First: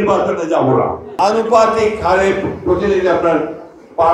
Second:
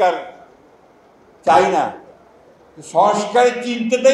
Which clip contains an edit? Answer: first; 1 cut; at 1.0 s

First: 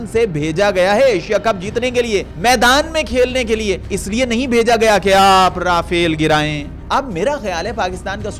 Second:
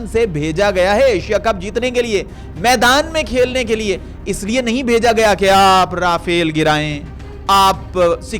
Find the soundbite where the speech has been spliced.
first; 3 cuts; at 2.3 s, 3.9 s, 6.7 s

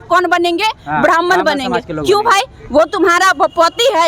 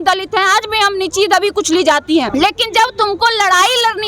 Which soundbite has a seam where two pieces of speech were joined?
second; 1 cut; at 2.3 s

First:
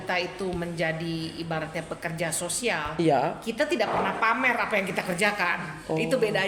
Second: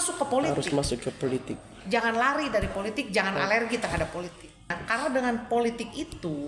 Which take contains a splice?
second; 1 cut; at 4.8 s

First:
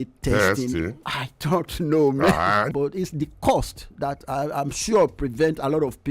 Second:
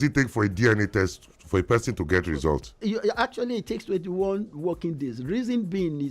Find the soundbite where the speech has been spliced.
first; 1 cut; at 2.7 s

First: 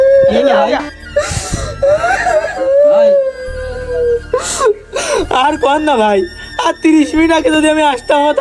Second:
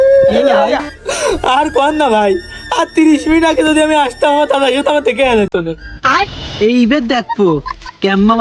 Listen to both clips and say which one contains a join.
second; 2 cuts; at 1.0 s, 6.0 s

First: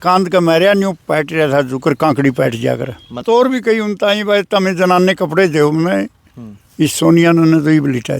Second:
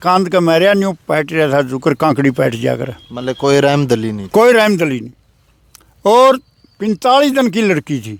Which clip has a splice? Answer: first; 1 cut; at 3.2 s

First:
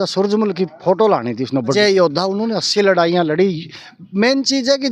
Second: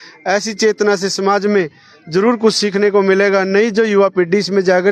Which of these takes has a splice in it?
first; 1 cut; at 1.7 s

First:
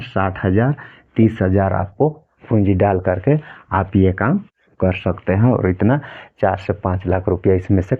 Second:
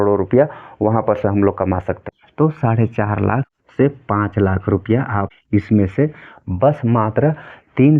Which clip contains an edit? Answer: second; 3 cuts; at 2.0 s, 3.6 s, 5.3 s

